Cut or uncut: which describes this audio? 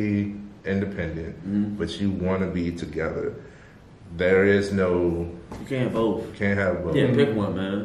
uncut